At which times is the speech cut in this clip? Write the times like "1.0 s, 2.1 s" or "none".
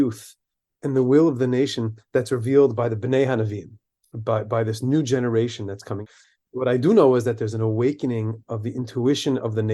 6.5 s